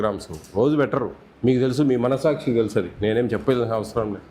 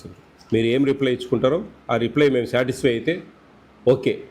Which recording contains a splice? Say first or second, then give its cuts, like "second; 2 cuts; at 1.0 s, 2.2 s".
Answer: first; 1 cut; at 1.2 s